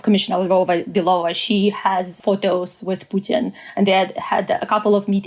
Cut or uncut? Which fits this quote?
cut